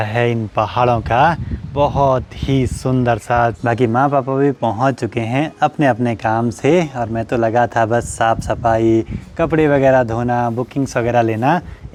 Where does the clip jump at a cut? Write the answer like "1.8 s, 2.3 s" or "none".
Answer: none